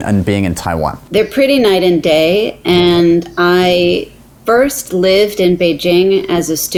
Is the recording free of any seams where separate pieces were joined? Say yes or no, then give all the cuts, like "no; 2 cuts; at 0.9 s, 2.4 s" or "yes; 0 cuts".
yes; 0 cuts